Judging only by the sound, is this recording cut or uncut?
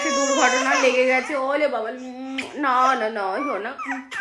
uncut